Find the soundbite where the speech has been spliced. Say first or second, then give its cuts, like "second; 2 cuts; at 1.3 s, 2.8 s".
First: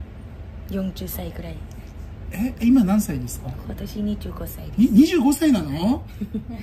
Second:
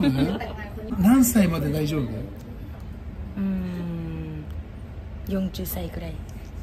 second; 1 cut; at 1.0 s